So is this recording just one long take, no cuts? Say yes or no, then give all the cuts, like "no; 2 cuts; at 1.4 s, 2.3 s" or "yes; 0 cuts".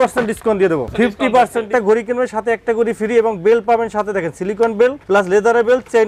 no; 3 cuts; at 0.9 s, 1.7 s, 5.0 s